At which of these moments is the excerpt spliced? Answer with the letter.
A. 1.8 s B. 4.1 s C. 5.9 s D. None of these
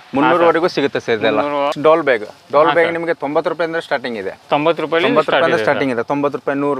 A